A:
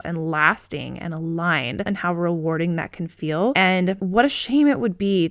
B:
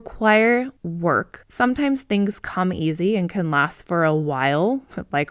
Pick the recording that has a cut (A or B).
A